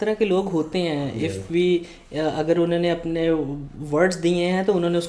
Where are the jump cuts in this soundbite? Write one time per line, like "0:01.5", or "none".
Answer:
none

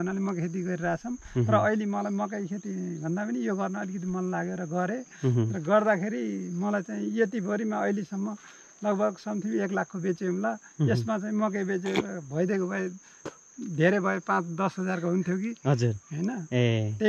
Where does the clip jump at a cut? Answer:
none

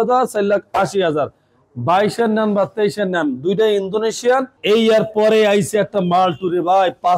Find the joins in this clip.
0:04.5

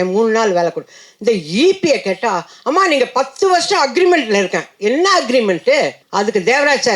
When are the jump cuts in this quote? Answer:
0:06.0

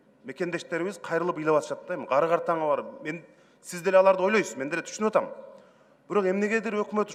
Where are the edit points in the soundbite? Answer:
none

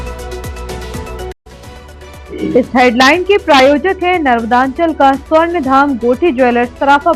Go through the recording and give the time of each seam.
0:01.3

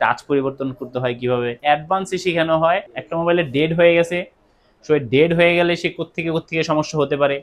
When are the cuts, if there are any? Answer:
0:01.6
0:03.0

